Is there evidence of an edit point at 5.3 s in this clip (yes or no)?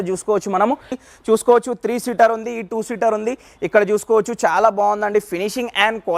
no